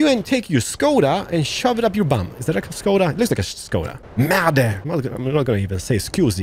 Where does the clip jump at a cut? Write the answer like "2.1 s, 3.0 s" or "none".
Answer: 4.0 s, 4.8 s

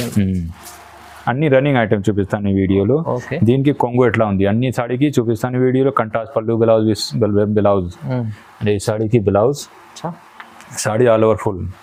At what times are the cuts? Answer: none

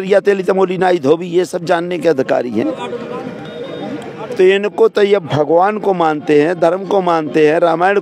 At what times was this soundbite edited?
none

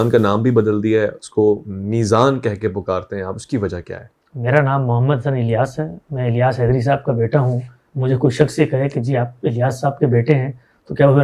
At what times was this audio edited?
none

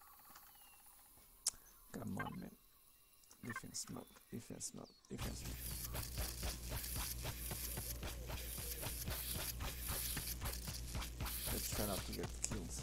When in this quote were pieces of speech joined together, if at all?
none

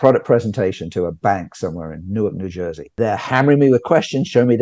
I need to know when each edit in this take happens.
3.0 s

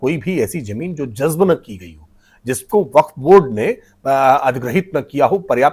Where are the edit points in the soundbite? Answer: none

